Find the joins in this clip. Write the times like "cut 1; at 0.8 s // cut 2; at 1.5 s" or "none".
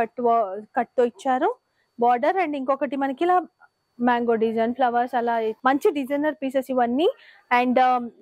cut 1; at 5.6 s